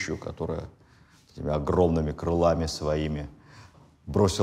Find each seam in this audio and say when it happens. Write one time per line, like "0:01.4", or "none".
none